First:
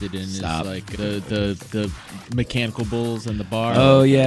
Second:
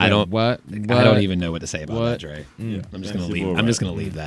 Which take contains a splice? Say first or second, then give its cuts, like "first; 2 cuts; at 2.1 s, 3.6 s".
second; 1 cut; at 2.9 s